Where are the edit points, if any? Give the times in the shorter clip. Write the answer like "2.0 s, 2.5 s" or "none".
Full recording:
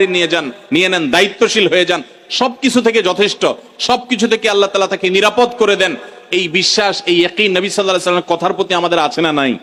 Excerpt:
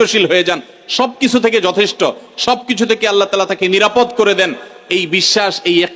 none